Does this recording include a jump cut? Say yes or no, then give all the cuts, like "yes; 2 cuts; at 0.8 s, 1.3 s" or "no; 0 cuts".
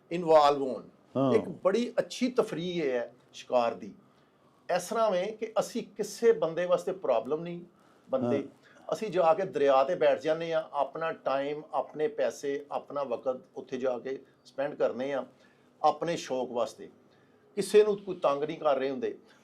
no; 0 cuts